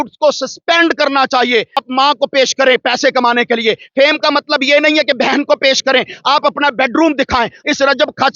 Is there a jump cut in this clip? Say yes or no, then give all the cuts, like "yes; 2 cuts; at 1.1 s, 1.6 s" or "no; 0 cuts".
yes; 2 cuts; at 1.8 s, 7.6 s